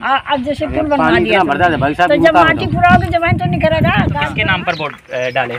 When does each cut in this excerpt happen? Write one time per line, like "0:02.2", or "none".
0:04.4

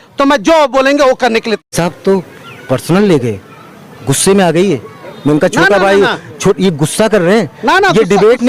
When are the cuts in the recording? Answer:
0:01.6

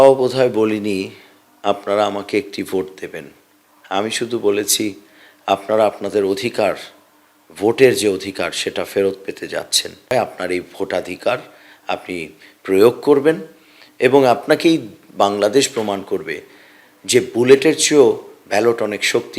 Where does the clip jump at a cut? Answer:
0:10.1
0:14.4

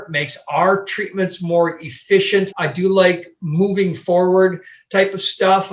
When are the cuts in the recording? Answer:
0:02.5

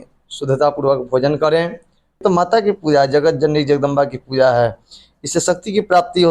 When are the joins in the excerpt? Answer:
0:02.2

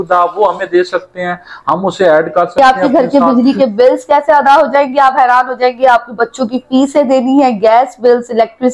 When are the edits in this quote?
0:02.6

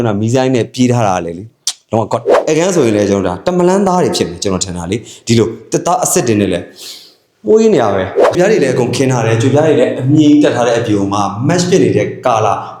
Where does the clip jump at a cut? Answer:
0:02.3
0:08.4

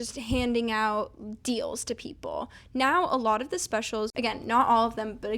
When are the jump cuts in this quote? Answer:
0:04.1

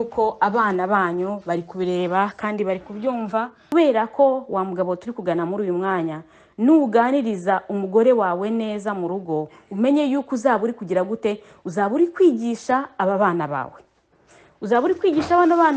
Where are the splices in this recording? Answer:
0:03.7

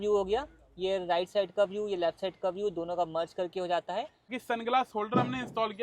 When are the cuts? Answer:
0:04.3

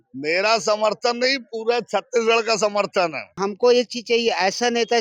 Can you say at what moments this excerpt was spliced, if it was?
0:03.4

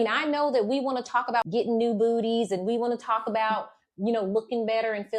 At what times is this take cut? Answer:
0:01.5

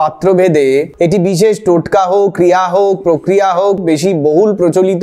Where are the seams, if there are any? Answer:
0:03.8

